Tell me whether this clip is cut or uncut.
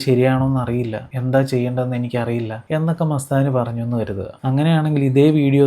uncut